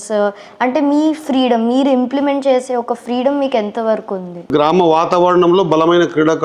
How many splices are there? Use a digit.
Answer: 1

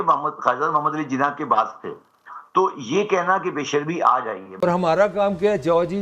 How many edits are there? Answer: 1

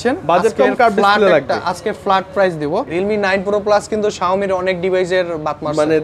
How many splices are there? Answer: 1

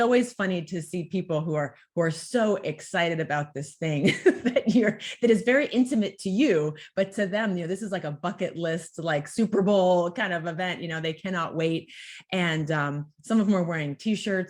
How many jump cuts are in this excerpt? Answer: 0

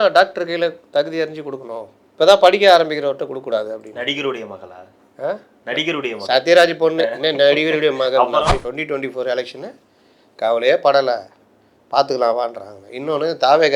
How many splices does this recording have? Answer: 1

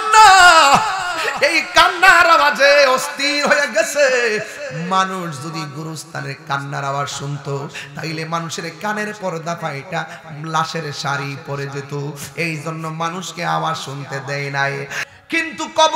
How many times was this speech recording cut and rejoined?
1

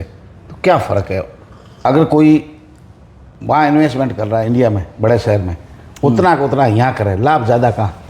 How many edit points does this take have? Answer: 1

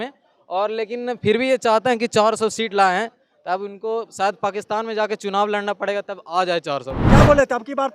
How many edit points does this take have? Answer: 1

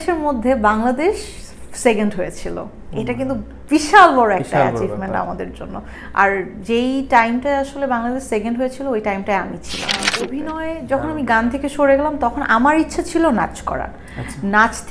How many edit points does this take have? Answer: 1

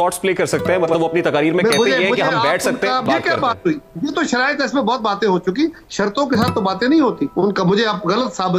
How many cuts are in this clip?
2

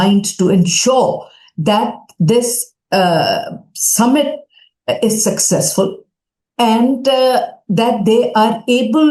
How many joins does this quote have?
0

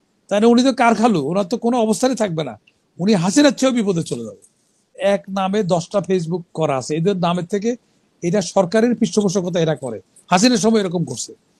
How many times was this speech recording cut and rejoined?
1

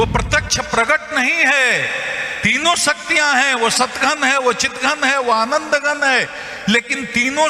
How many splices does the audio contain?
0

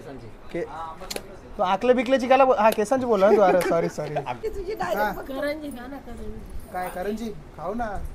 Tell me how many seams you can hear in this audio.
1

